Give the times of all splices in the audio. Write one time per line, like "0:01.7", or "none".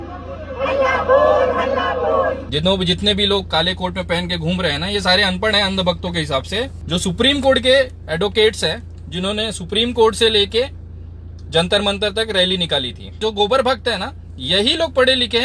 0:02.5
0:06.8
0:13.2